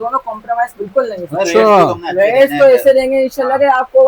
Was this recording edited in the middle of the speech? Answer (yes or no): no